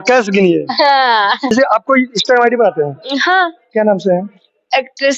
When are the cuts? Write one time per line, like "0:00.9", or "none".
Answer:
0:01.5